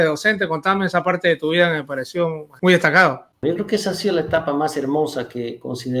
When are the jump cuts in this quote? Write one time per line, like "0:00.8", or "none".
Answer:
0:02.5
0:03.3